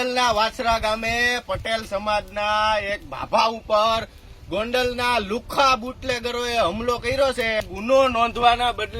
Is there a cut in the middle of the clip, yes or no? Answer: yes